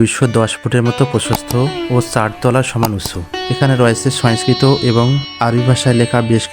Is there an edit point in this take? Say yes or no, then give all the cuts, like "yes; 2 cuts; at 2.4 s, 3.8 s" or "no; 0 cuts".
yes; 1 cut; at 3.3 s